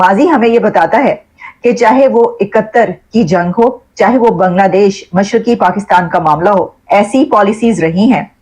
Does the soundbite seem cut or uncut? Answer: cut